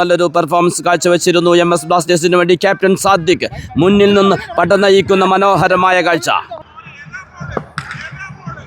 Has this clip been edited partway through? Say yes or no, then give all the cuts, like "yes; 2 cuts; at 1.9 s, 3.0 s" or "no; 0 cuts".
yes; 1 cut; at 6.7 s